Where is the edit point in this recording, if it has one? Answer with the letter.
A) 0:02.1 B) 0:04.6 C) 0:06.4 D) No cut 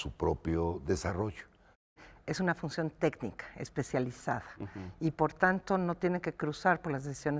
A